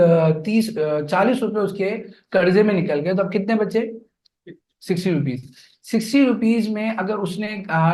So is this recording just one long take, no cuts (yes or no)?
yes